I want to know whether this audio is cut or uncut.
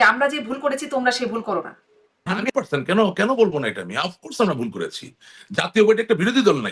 cut